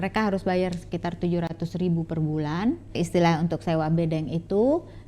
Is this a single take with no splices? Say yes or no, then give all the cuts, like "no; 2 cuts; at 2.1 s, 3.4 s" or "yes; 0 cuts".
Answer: no; 1 cut; at 3.0 s